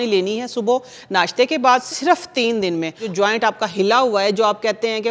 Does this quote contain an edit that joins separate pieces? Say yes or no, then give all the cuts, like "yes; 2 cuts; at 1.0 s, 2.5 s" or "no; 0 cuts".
yes; 2 cuts; at 1.9 s, 3.1 s